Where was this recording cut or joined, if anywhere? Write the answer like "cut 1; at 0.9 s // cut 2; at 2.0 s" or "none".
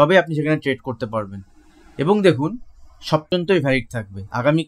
cut 1; at 3.3 s